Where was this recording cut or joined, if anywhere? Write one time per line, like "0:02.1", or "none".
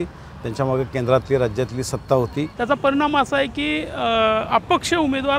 0:02.5

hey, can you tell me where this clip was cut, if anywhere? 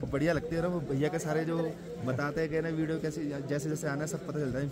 none

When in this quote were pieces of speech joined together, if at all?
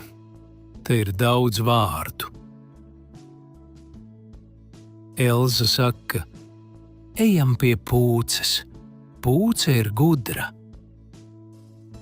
0:02.3
0:05.1
0:10.5

